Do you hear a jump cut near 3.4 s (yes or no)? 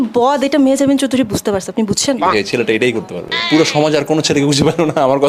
yes